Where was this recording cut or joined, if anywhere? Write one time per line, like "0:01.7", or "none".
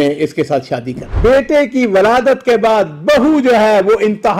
0:01.1